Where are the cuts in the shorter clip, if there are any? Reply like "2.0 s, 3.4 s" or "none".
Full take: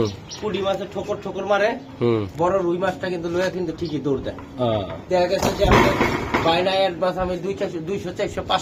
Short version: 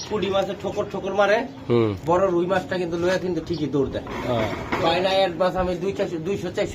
4.6 s